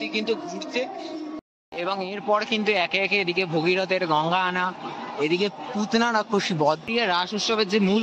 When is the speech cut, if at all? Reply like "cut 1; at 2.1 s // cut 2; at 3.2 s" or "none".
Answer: cut 1; at 1.5 s // cut 2; at 6.9 s

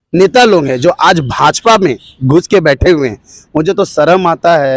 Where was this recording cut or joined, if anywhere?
none

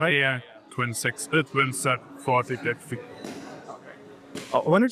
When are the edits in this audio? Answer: none

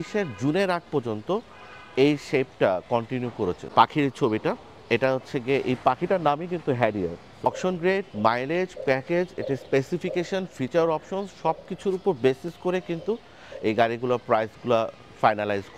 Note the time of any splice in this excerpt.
cut 1; at 3.6 s // cut 2; at 7.5 s

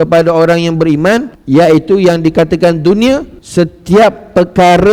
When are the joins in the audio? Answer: cut 1; at 1.3 s // cut 2; at 3.4 s

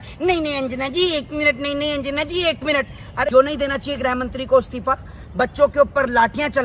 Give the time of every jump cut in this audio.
cut 1; at 3.2 s

